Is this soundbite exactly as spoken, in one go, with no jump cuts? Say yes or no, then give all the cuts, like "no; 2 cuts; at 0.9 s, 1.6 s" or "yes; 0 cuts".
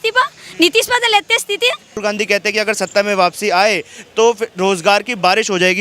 no; 1 cut; at 2.0 s